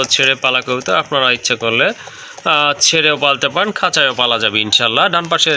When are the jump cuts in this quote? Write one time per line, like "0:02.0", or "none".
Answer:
none